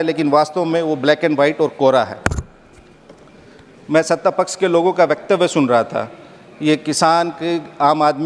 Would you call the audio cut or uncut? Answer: uncut